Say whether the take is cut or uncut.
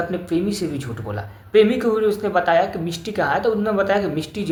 uncut